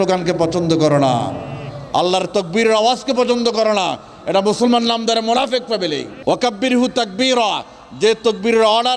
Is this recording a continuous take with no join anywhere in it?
no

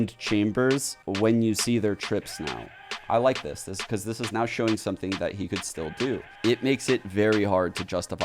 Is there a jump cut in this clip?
yes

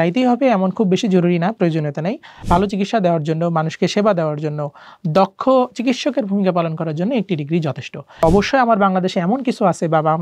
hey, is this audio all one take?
no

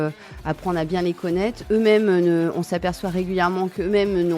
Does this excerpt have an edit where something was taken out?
no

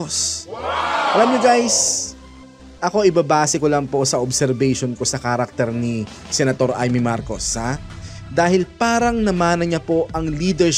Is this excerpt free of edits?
yes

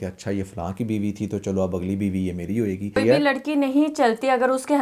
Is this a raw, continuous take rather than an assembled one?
no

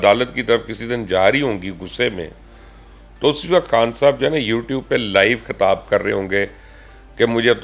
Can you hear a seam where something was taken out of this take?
no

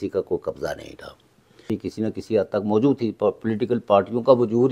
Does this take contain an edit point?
yes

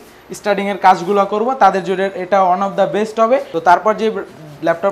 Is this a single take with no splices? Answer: no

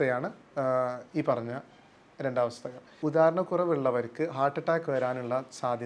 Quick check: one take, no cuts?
no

